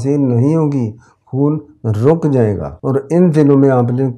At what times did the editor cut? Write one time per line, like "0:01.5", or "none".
0:02.7